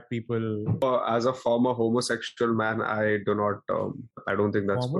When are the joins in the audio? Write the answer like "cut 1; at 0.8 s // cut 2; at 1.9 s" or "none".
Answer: cut 1; at 0.8 s // cut 2; at 4.1 s